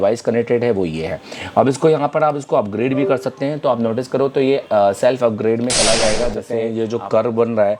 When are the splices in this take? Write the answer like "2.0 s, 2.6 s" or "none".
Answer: 6.7 s